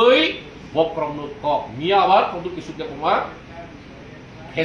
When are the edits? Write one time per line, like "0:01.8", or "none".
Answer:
none